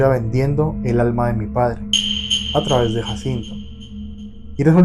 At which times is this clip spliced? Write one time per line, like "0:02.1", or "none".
none